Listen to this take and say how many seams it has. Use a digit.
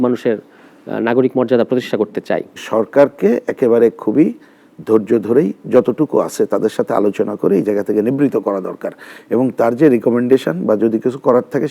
1